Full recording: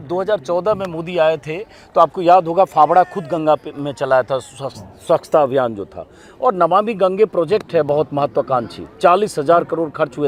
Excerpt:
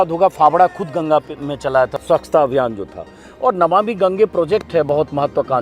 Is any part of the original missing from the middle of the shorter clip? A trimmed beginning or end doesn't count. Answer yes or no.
yes